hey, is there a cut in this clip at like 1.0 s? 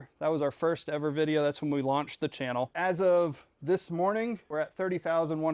no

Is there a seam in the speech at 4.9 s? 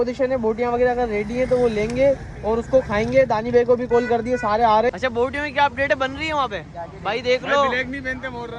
yes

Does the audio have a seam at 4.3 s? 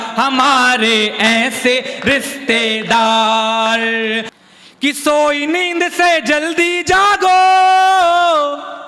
yes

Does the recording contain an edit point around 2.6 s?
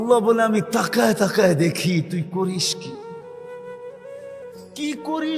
yes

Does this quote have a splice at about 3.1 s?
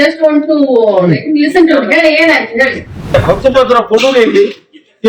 yes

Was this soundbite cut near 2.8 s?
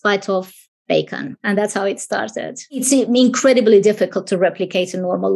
yes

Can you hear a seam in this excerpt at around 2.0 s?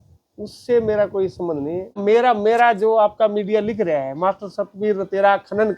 yes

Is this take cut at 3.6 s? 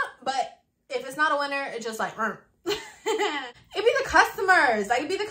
yes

